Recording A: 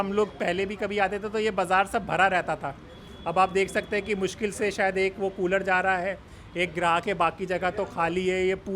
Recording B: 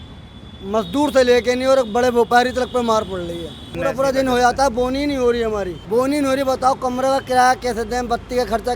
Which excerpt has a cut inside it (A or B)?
B